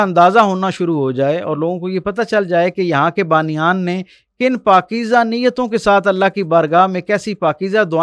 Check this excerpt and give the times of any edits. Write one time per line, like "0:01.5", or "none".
none